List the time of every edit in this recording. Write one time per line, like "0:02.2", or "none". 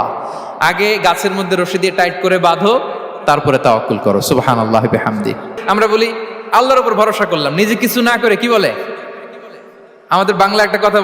0:05.5